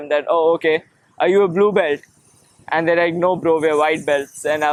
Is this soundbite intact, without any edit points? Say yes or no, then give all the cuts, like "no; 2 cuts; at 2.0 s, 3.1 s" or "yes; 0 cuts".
yes; 0 cuts